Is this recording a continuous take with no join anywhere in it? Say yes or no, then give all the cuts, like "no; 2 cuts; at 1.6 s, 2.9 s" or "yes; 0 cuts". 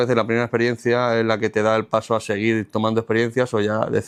yes; 0 cuts